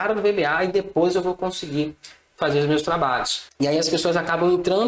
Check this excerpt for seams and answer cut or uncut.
cut